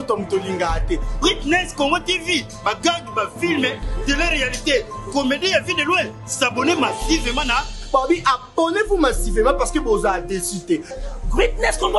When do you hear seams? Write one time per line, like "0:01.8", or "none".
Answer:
none